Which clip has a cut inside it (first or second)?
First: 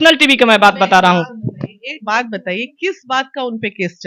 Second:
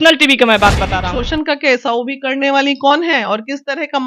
second